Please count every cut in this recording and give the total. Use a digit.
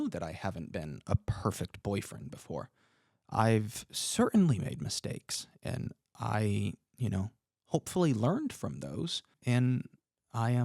1